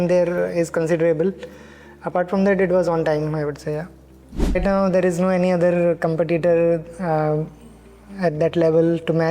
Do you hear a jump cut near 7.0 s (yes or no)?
no